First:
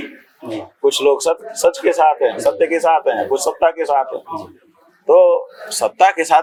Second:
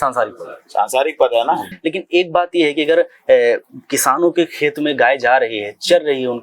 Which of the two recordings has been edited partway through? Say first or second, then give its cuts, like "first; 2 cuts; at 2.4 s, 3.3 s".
second; 1 cut; at 1.7 s